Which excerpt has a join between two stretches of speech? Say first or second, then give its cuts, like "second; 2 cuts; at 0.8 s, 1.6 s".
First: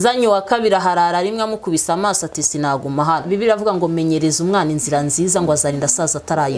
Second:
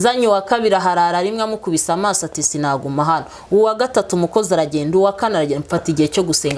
first; 1 cut; at 3.2 s